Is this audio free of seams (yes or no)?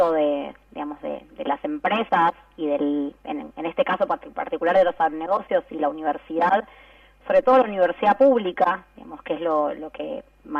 yes